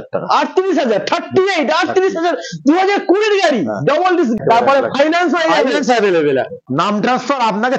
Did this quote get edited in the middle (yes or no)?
yes